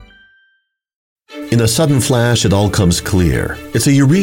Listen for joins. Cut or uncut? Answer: cut